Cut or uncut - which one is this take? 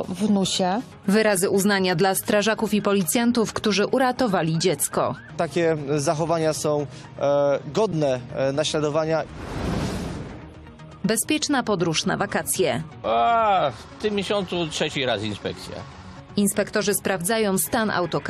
cut